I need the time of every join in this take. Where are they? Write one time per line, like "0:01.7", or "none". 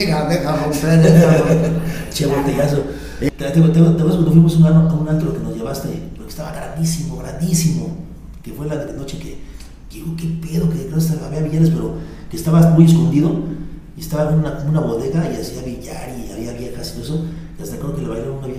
0:03.3